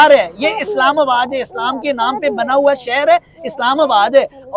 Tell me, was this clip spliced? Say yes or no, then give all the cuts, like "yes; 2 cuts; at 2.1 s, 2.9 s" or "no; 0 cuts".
no; 0 cuts